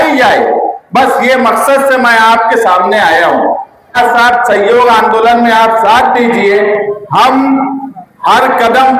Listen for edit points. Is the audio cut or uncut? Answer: cut